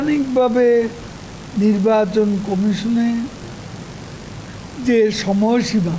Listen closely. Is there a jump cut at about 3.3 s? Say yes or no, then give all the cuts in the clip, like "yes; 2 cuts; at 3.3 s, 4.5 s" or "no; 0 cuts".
no; 0 cuts